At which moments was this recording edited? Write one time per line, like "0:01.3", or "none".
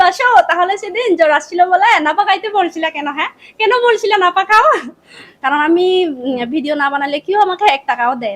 0:05.4